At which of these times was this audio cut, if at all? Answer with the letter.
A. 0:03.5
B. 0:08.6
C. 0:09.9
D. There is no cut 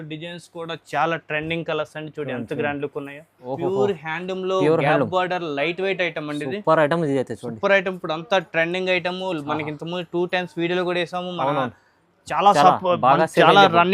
A